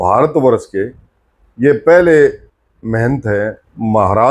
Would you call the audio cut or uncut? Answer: uncut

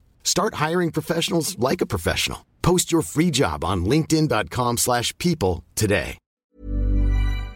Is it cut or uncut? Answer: cut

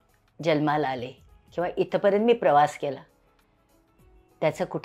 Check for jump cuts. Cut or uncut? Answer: uncut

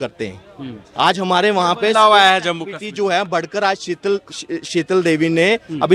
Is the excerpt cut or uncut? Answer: uncut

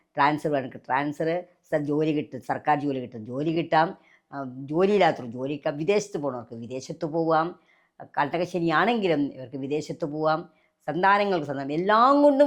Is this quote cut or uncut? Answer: uncut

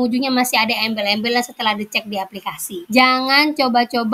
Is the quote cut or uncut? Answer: uncut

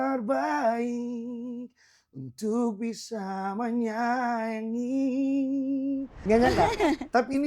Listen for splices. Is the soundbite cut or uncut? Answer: cut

